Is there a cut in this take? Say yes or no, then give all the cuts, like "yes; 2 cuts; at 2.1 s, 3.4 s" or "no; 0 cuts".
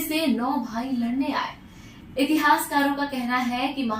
no; 0 cuts